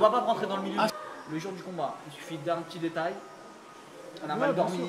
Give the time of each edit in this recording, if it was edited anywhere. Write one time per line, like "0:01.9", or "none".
0:00.9